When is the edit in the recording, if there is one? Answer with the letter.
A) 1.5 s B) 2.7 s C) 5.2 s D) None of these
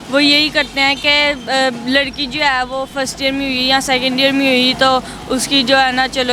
D